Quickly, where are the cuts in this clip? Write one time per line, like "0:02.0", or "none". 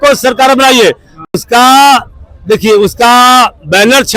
none